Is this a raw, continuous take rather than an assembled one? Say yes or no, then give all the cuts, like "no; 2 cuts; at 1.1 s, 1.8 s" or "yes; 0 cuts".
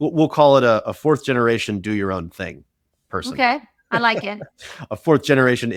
yes; 0 cuts